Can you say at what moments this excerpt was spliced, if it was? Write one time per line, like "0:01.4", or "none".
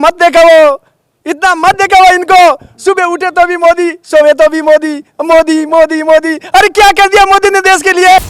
none